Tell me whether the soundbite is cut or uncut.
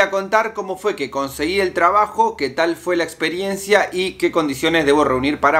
uncut